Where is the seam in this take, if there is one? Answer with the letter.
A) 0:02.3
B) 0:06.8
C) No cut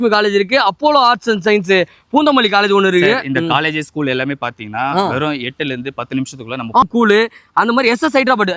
B